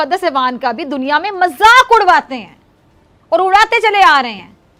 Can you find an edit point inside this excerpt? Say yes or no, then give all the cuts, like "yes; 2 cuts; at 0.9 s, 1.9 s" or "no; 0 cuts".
no; 0 cuts